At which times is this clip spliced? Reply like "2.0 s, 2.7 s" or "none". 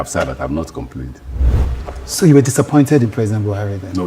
1.5 s